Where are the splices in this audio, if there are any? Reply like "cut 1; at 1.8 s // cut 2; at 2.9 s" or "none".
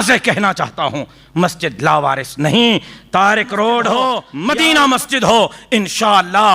cut 1; at 4.3 s